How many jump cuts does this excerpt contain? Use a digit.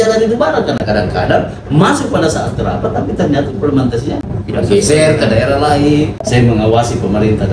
1